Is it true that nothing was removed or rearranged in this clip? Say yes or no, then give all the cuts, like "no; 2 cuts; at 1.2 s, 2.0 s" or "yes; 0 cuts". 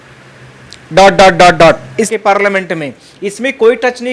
no; 1 cut; at 2.1 s